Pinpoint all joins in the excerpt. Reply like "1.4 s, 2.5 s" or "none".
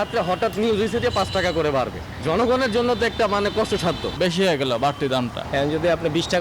4.1 s, 5.4 s